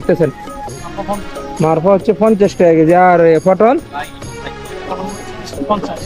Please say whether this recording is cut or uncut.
uncut